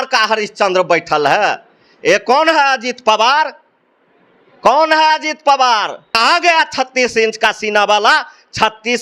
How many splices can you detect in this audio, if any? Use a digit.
1